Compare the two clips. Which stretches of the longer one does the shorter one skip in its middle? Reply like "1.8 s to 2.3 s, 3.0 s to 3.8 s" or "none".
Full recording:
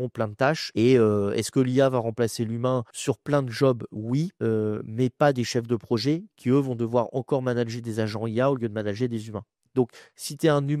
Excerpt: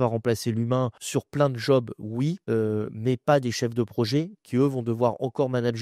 none